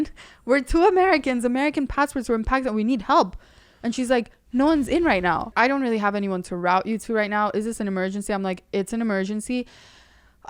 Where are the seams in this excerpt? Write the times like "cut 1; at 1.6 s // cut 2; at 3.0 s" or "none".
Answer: cut 1; at 5.5 s